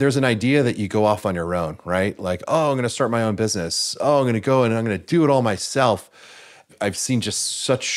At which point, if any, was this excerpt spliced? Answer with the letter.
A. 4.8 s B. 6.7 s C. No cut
C